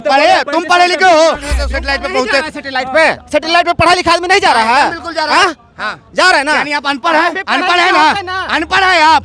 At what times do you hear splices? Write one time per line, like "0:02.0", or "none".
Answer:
0:01.8